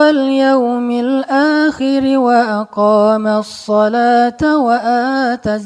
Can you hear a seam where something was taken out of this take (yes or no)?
no